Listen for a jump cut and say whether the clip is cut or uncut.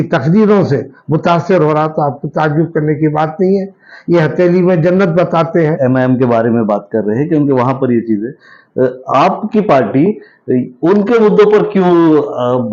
cut